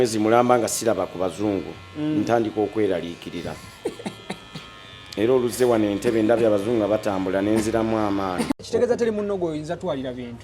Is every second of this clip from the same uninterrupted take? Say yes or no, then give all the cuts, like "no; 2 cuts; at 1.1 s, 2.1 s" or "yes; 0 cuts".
no; 1 cut; at 8.6 s